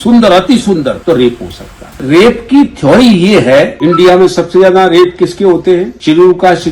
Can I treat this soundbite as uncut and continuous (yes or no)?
no